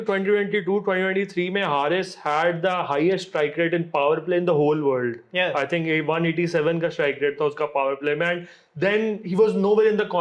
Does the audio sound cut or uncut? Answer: uncut